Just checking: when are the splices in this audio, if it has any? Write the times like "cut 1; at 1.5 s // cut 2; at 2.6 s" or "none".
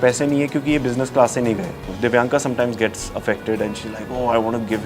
cut 1; at 1.8 s